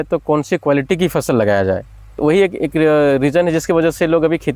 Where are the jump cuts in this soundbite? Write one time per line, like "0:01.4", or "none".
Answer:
0:02.2

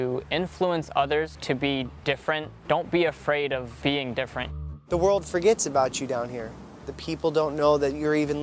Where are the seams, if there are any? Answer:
0:01.4
0:02.5
0:03.7
0:04.6
0:06.9

